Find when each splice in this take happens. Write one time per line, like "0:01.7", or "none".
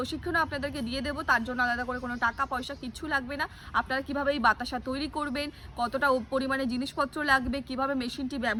none